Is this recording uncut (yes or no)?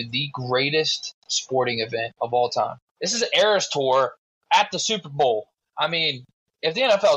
no